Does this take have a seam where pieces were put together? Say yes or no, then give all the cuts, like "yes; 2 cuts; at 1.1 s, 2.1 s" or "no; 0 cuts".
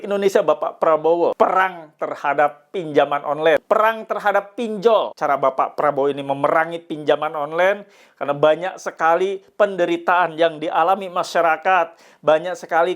yes; 3 cuts; at 1.3 s, 3.6 s, 5.1 s